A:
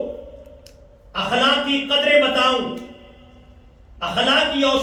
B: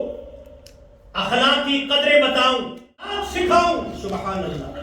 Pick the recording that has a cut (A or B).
B